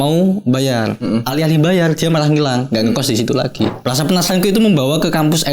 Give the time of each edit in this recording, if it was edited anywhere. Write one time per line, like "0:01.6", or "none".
0:03.8